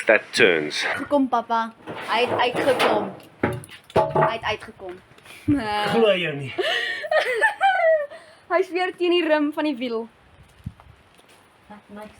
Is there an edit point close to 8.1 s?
no; 1 cut; at 0.9 s

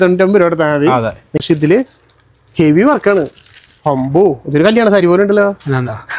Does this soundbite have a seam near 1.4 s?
yes; 1 cut; at 1.4 s

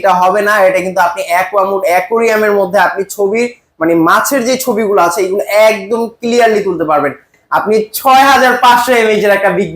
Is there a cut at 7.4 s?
yes; 1 cut; at 7.4 s

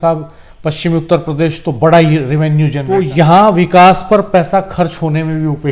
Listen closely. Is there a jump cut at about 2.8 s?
yes; 1 cut; at 2.8 s

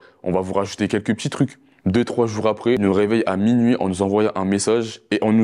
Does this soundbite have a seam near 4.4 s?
no; 2 cuts; at 1.7 s, 2.8 s

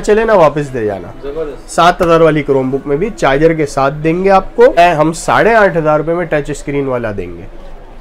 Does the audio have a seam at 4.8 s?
yes; 1 cut; at 4.8 s

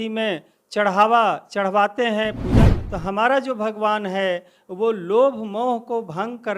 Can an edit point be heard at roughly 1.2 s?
no; 1 cut; at 2.5 s

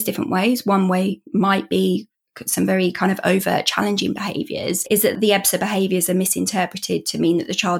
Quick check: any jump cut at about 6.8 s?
no; 1 cut; at 5.1 s

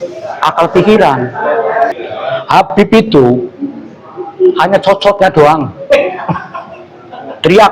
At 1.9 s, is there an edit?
yes; 1 cut; at 1.9 s

